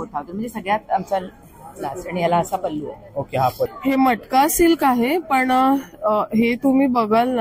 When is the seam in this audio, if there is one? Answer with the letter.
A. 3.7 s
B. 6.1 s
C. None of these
A